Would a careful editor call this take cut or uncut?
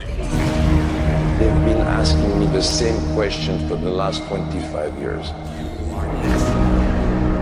uncut